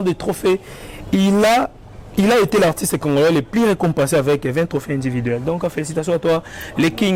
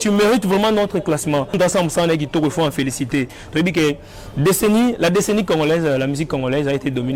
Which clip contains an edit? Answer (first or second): second